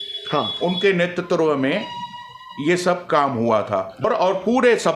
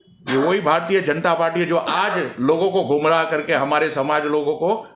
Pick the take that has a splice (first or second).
first